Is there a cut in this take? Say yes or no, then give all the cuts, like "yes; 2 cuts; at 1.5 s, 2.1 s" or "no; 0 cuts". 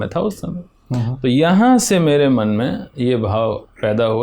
no; 0 cuts